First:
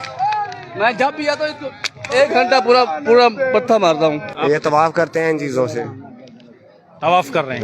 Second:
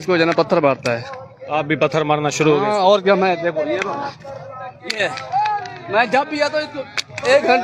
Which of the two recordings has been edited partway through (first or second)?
first